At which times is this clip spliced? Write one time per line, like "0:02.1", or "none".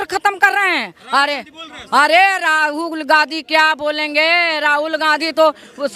none